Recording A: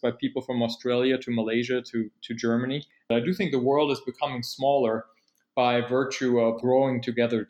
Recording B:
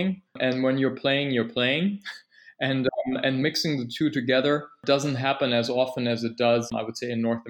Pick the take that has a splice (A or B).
A